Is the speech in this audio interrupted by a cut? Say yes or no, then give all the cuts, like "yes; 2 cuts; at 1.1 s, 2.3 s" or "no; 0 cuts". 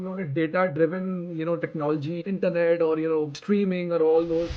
yes; 2 cuts; at 2.2 s, 3.4 s